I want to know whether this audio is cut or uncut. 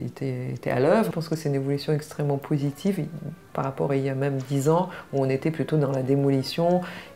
cut